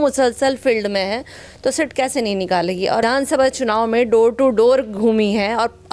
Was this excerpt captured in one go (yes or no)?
no